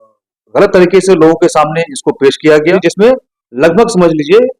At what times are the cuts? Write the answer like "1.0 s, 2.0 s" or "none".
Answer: 2.7 s

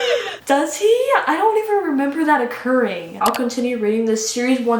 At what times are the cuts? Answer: 3.1 s

